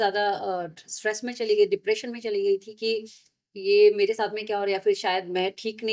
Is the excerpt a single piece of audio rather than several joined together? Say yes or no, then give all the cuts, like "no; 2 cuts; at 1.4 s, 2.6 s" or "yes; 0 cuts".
yes; 0 cuts